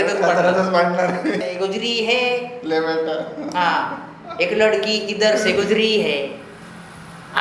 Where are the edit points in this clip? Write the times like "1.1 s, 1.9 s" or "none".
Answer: 1.4 s